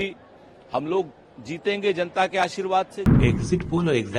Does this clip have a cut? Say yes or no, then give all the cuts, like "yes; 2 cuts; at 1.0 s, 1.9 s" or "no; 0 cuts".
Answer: yes; 1 cut; at 3.0 s